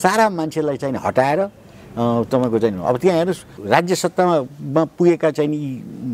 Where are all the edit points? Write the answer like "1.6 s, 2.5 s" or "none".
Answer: 3.5 s